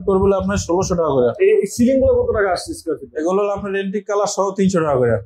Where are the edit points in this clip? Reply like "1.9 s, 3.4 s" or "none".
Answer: 1.3 s